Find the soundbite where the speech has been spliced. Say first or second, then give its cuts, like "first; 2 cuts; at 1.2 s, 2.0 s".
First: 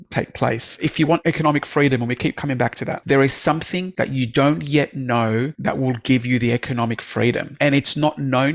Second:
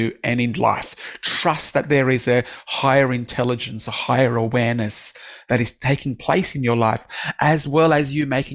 first; 5 cuts; at 1.0 s, 2.9 s, 3.8 s, 5.5 s, 7.5 s